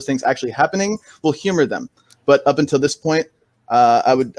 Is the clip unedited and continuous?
yes; 0 cuts

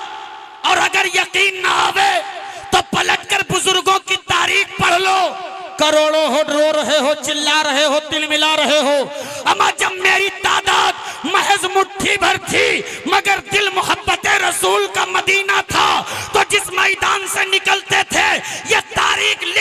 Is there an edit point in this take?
no; 0 cuts

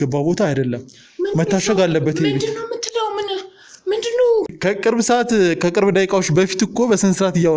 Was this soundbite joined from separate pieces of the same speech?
yes; 1 cut; at 4.5 s

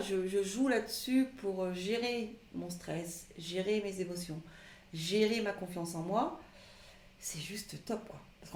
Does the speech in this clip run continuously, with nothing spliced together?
yes; 0 cuts

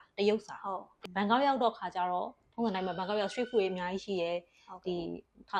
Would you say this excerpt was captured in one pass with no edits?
no; 1 cut; at 1.0 s

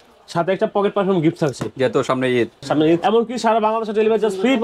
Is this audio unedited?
no; 1 cut; at 3.0 s

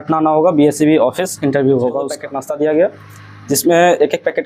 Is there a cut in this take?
yes; 1 cut; at 2.3 s

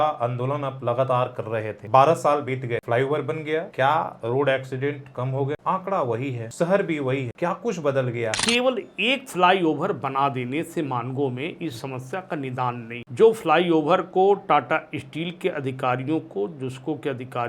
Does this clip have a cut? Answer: yes; 8 cuts; at 1.7 s, 2.8 s, 3.7 s, 5.6 s, 6.4 s, 7.3 s, 8.4 s, 13.0 s

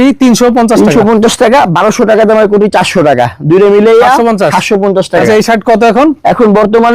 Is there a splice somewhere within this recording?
yes; 1 cut; at 5.2 s

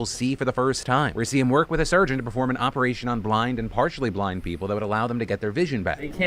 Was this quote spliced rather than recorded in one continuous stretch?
yes; 1 cut; at 1.7 s

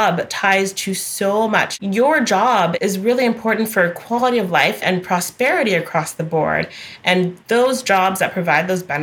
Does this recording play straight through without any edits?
no; 3 cuts; at 1.7 s, 2.7 s, 4.8 s

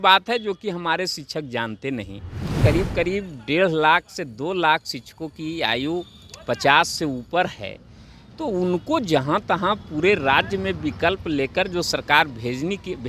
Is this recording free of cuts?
no; 1 cut; at 2.6 s

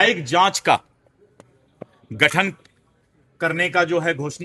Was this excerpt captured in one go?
yes; 0 cuts

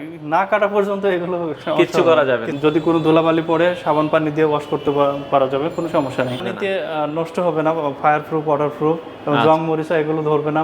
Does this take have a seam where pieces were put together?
yes; 2 cuts; at 2.5 s, 6.4 s

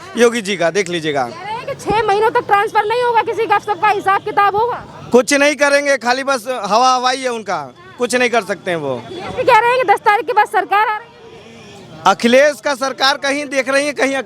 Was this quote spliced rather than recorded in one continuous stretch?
no; 0 cuts

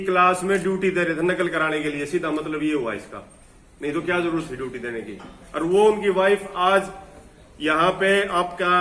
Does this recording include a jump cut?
no; 0 cuts

